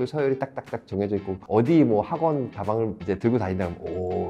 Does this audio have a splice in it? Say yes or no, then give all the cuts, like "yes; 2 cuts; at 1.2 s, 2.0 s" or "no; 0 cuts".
yes; 1 cut; at 1.4 s